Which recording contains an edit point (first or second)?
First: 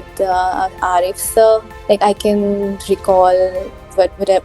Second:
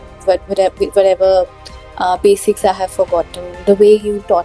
first